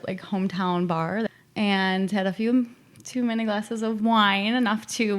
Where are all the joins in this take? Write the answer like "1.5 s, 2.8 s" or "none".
1.3 s